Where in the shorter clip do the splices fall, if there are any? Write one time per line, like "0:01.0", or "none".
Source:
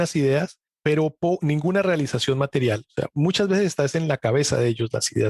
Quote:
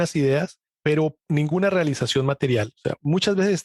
0:01.2